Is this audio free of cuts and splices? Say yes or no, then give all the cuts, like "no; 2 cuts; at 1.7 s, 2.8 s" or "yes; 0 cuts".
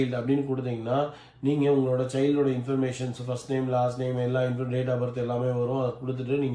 yes; 0 cuts